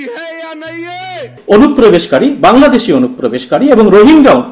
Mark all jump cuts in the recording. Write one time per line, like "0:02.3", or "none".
0:01.4